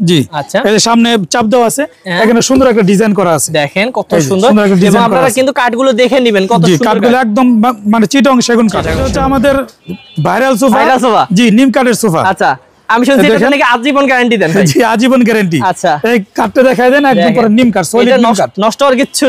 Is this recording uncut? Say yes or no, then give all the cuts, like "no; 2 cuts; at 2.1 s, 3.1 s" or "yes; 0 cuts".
no; 1 cut; at 9.1 s